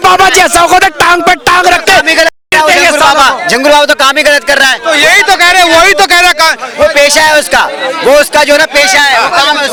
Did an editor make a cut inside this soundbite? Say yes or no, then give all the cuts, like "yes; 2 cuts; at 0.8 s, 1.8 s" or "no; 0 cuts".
no; 0 cuts